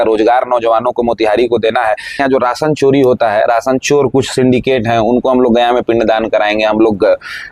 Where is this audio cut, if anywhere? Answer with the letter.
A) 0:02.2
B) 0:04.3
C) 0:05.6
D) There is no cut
A